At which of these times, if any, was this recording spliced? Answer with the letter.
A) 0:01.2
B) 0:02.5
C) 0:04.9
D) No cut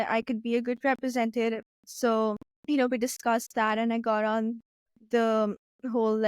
B